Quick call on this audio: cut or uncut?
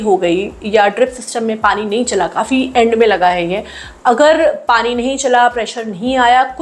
uncut